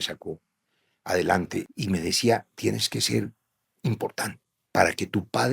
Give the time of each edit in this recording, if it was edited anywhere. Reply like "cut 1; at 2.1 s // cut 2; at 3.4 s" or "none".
cut 1; at 1.7 s // cut 2; at 4.5 s